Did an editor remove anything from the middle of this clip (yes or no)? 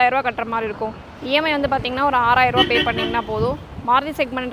no